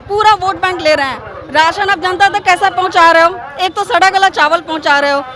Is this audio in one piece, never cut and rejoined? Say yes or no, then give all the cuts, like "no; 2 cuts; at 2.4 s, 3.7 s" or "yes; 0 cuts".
yes; 0 cuts